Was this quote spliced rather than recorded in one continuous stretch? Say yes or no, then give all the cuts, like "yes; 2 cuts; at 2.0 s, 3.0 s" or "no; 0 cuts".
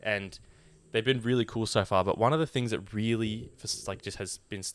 no; 0 cuts